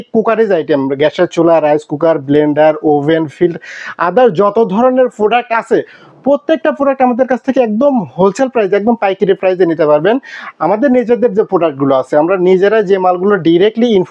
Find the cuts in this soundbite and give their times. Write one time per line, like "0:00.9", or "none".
none